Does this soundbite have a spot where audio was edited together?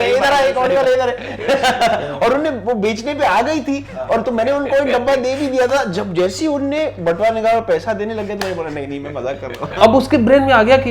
yes; 1 cut; at 9.6 s

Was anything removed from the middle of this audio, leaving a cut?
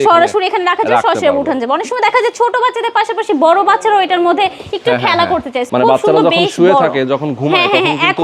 yes; 1 cut; at 5.6 s

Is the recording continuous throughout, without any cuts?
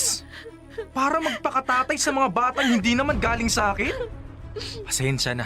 no; 1 cut; at 4.3 s

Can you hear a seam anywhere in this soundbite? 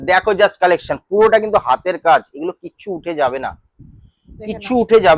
no; 0 cuts

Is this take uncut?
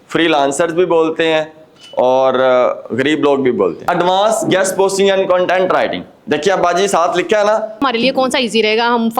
no; 2 cuts; at 3.8 s, 7.8 s

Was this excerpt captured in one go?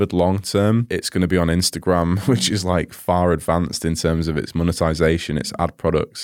no; 2 cuts; at 1.0 s, 2.2 s

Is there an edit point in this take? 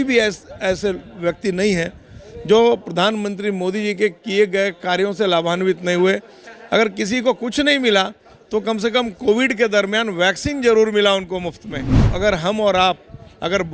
yes; 1 cut; at 12.0 s

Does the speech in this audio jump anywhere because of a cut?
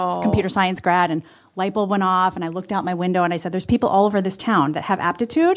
no; 0 cuts

